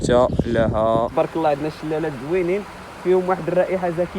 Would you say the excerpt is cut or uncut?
cut